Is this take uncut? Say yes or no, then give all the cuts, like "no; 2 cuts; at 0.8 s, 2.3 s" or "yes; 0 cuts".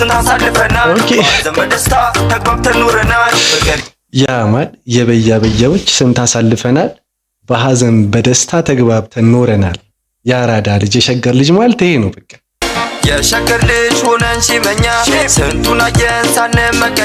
no; 1 cut; at 12.6 s